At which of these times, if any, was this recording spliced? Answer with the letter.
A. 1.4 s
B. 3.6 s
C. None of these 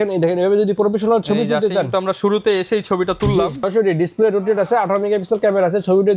B